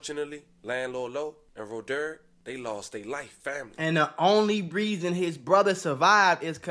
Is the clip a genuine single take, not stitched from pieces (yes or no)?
no